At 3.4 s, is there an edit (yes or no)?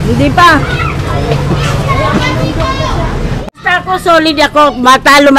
yes